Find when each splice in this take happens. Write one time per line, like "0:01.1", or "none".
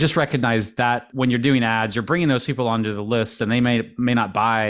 0:01.1